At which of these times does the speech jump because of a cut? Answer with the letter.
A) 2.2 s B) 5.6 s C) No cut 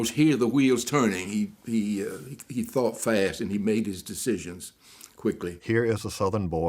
B